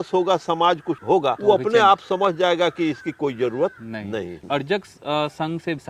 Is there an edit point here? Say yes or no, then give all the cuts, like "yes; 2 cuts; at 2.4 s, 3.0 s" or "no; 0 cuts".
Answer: yes; 2 cuts; at 1.2 s, 4.4 s